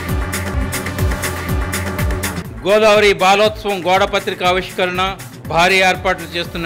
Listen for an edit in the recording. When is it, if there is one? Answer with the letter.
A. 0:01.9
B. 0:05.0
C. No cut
A